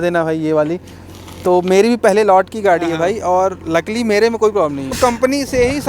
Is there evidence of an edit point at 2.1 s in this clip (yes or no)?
no